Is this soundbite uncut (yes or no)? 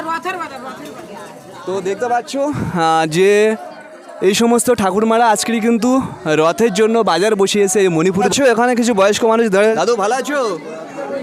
no